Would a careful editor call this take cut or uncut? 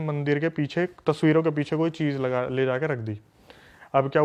uncut